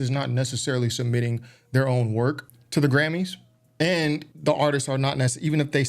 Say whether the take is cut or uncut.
cut